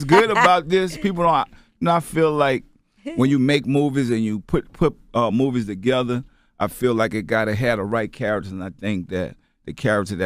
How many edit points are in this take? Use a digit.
1